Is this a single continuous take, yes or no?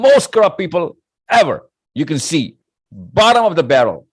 yes